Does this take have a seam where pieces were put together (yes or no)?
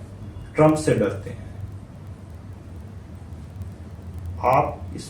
no